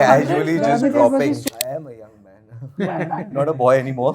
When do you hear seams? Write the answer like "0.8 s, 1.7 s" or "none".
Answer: 1.5 s